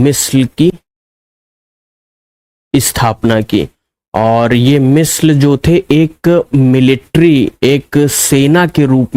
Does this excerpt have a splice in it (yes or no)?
no